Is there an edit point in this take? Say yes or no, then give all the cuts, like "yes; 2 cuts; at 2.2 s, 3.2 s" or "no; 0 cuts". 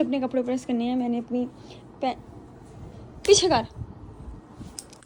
no; 0 cuts